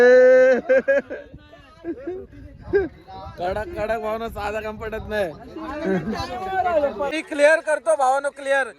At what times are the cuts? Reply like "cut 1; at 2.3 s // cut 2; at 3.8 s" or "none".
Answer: cut 1; at 7.2 s